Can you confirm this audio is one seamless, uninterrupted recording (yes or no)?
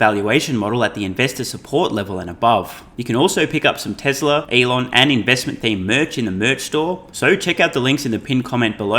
no